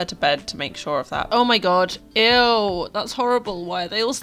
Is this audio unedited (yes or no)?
no